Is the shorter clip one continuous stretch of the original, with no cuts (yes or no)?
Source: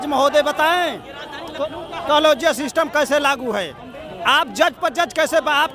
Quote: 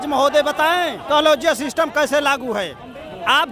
no